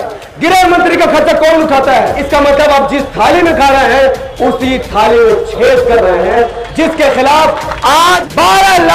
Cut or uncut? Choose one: cut